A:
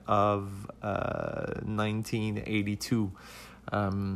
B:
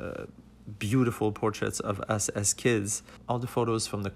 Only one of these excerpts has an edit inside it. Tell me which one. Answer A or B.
B